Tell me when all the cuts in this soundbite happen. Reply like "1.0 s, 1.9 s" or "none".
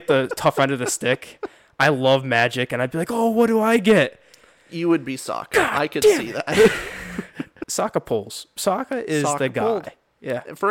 7.6 s

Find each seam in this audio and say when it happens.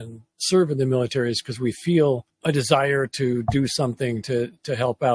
2.3 s

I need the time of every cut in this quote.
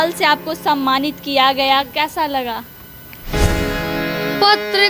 3.3 s

